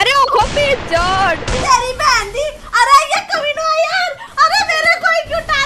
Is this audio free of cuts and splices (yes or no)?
no